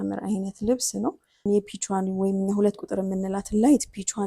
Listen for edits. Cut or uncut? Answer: cut